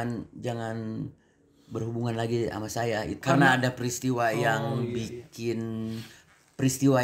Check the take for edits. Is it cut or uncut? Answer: cut